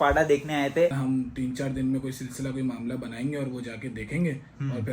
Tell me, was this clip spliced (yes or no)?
yes